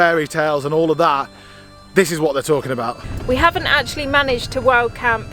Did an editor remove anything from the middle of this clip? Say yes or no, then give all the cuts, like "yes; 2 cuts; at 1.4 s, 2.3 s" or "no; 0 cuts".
yes; 1 cut; at 3.1 s